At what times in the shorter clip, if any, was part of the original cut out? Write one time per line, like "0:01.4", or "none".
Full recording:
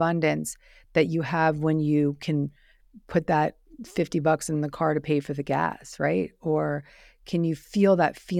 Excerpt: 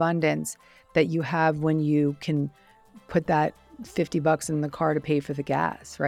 none